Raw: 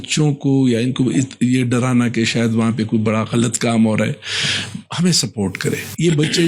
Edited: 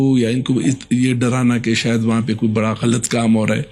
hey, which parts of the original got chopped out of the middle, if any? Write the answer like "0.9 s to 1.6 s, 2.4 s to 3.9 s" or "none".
none

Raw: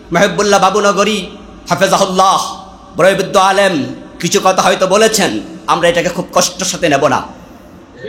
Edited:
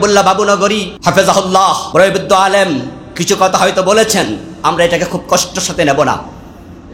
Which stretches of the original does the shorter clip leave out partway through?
1.2 s to 1.5 s, 2.5 s to 2.9 s

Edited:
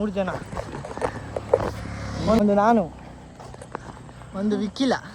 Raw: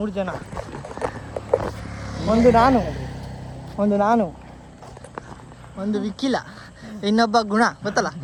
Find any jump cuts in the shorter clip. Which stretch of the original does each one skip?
2.4 s to 3.8 s

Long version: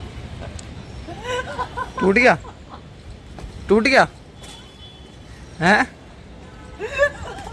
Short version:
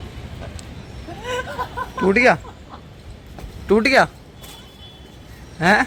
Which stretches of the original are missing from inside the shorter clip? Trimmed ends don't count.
none

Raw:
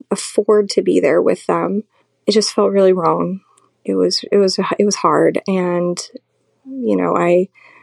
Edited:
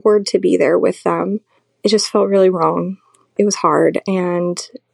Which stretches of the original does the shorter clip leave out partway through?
3.7 s to 4.7 s

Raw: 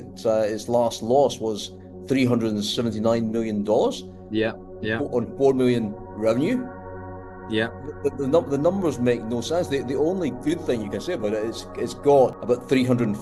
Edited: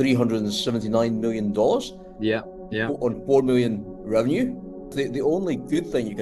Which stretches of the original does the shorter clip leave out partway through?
7.0 s to 9.7 s

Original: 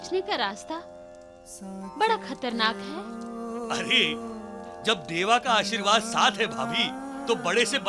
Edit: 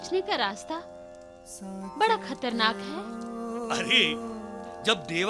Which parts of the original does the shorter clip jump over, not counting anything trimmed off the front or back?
none

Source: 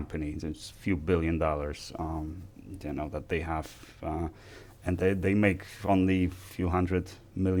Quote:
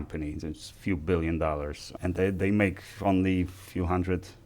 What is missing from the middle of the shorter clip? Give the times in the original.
1.8 s to 4.7 s

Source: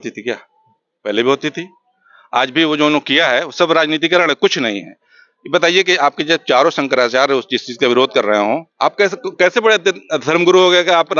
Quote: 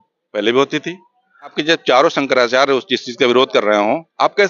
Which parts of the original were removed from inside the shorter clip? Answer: 2.3 s to 6.2 s

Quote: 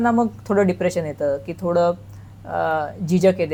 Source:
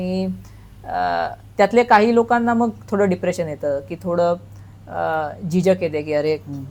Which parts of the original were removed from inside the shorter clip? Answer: none

